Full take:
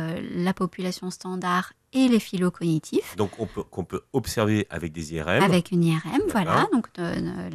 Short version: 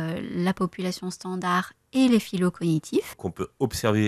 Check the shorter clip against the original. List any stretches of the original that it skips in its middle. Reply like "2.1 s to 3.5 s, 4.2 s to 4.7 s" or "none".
3.1 s to 3.6 s